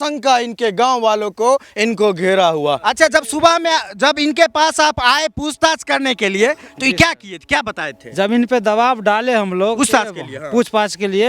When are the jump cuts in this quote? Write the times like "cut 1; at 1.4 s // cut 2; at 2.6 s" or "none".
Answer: cut 1; at 2.8 s